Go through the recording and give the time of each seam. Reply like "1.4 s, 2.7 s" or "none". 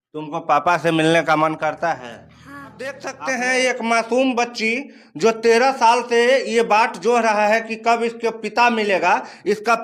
3.0 s